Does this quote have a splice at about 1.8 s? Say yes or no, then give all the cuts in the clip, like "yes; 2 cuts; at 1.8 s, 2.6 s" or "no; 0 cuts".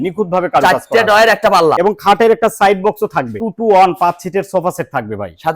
yes; 2 cuts; at 1.8 s, 3.4 s